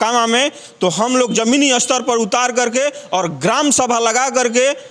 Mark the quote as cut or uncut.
uncut